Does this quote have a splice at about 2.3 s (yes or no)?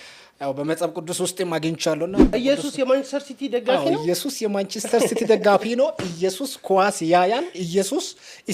yes